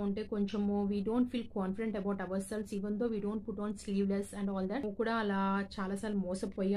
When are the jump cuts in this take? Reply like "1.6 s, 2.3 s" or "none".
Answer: 4.9 s